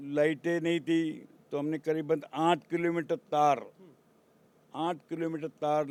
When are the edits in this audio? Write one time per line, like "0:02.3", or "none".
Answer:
none

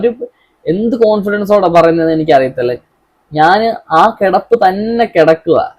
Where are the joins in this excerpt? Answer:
none

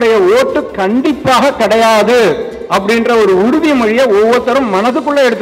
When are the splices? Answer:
none

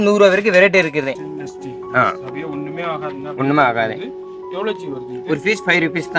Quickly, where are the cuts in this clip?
0:01.0

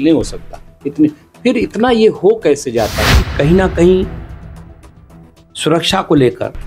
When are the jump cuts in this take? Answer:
0:03.2

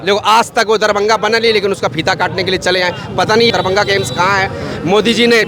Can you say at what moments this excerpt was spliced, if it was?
0:03.5

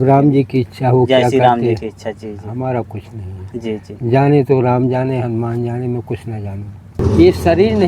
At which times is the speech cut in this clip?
0:07.0

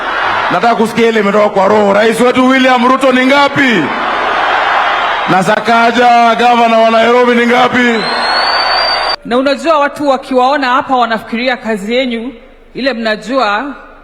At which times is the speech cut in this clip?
0:09.0

